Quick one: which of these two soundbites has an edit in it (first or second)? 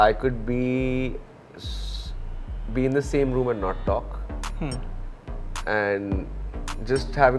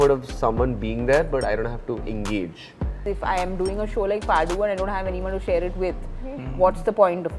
second